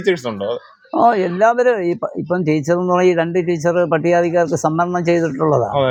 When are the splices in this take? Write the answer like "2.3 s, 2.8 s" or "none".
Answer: none